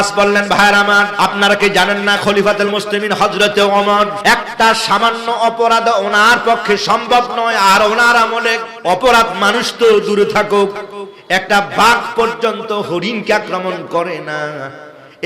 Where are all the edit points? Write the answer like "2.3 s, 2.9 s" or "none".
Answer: 1.1 s, 4.2 s, 8.7 s